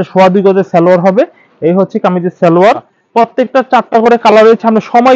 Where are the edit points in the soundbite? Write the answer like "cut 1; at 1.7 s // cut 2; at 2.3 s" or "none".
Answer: cut 1; at 2.9 s